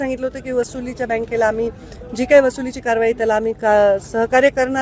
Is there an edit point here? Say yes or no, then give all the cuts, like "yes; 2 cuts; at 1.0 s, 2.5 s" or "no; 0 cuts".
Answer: no; 0 cuts